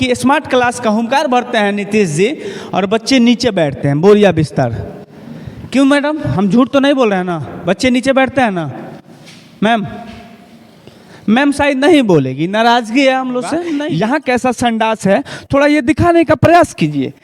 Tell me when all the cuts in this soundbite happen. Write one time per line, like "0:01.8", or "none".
0:13.6